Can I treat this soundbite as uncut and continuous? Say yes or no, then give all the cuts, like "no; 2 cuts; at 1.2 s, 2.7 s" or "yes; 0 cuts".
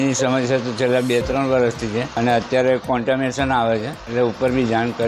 no; 2 cuts; at 2.1 s, 4.0 s